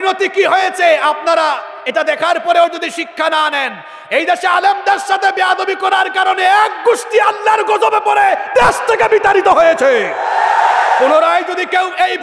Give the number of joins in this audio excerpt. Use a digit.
0